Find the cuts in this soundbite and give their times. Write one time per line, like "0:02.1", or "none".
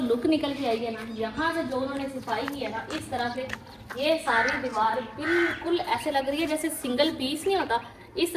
none